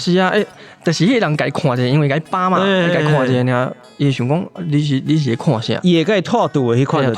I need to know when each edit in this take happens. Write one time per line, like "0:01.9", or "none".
0:03.9